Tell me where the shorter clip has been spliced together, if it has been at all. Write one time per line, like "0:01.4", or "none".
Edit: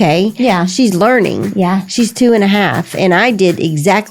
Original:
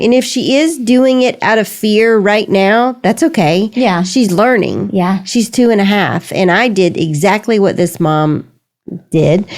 none